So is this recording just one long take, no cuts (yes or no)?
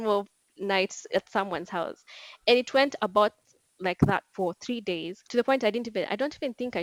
yes